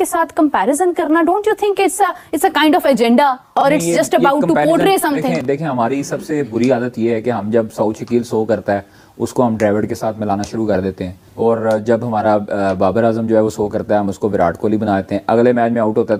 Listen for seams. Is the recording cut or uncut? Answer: uncut